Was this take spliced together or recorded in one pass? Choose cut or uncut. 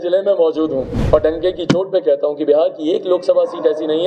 cut